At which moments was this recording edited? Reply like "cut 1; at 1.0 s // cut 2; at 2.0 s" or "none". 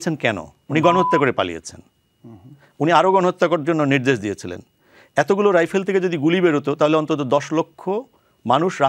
none